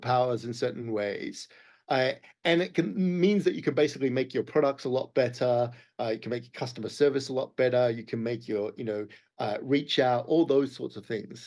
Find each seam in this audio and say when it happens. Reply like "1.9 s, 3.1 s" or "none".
none